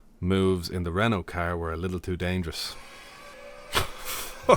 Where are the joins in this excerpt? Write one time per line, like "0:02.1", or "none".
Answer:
0:03.3